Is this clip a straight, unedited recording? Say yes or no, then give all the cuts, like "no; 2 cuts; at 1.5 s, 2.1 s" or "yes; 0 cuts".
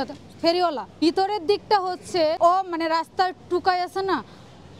no; 2 cuts; at 1.0 s, 2.4 s